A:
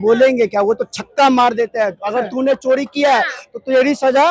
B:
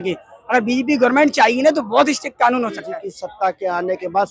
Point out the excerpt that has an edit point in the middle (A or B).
B